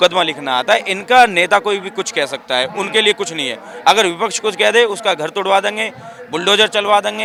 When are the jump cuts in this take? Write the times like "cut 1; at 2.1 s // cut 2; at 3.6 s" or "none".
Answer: none